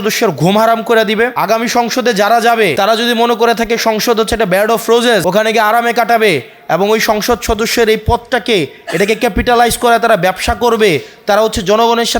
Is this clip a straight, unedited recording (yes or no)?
no